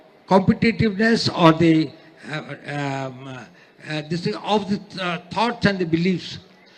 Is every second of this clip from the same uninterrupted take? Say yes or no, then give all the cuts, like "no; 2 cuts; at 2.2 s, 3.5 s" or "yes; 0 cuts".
yes; 0 cuts